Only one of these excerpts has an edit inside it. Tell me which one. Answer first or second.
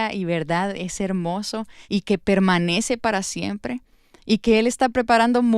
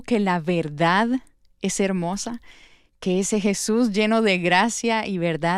first